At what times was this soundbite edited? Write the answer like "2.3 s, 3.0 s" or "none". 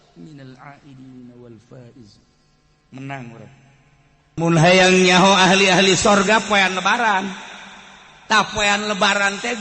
4.4 s